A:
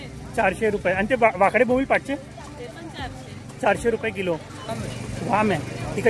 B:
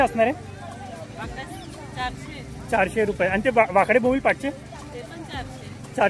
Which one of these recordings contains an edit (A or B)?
A